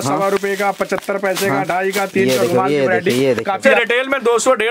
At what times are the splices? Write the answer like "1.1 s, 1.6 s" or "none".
3.6 s